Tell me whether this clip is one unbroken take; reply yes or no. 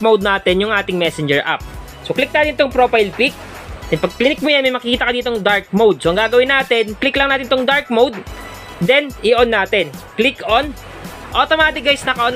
yes